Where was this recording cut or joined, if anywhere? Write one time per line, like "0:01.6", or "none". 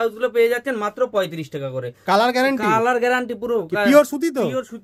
none